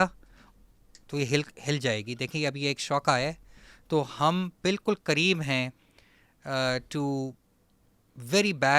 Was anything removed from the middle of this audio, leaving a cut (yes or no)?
no